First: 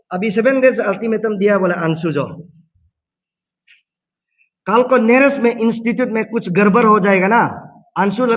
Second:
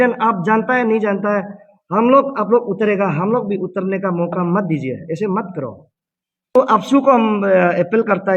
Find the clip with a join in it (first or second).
second